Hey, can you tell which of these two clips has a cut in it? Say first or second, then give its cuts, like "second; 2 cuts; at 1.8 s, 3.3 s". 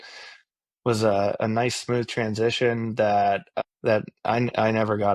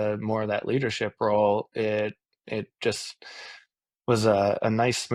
first; 1 cut; at 3.5 s